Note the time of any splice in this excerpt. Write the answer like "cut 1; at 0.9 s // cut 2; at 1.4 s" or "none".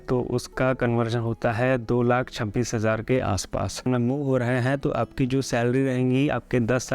cut 1; at 3.8 s